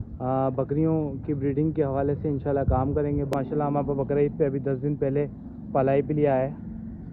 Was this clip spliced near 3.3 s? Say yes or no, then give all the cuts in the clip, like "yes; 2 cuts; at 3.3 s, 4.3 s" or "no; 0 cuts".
yes; 1 cut; at 3.3 s